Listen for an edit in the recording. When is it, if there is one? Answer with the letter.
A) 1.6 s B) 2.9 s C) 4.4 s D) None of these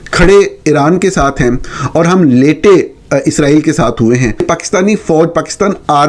C